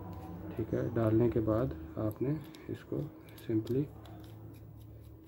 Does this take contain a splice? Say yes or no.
no